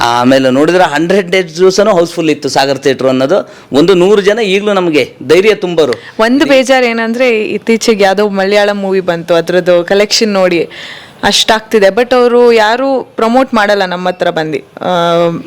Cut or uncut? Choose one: cut